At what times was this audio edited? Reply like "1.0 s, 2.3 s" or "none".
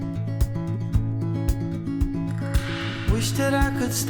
none